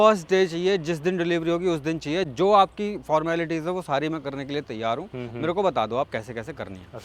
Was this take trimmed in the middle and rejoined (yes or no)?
no